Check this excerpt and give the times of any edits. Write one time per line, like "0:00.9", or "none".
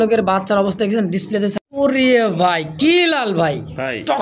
0:01.6